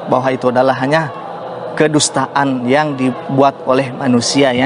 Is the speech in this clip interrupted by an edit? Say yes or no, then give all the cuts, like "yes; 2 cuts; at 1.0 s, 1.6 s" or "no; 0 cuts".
no; 0 cuts